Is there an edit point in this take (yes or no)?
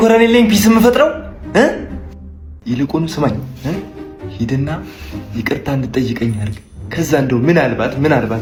no